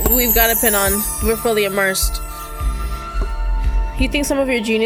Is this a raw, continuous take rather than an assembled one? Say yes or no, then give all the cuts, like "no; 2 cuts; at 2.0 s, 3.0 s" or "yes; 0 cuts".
yes; 0 cuts